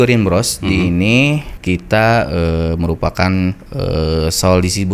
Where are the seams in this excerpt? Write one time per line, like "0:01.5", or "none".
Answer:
0:01.5
0:03.7